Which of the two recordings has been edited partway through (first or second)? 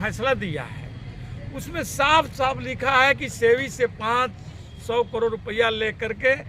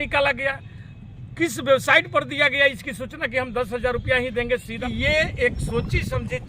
second